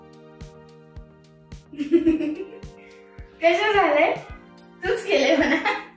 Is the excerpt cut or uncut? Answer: cut